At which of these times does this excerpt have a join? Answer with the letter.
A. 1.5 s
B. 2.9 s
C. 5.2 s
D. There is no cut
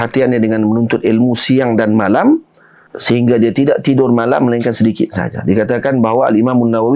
B